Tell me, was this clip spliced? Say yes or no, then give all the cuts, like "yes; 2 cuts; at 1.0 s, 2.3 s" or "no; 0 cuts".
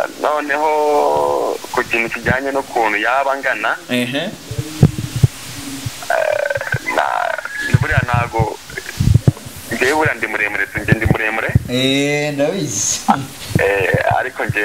no; 0 cuts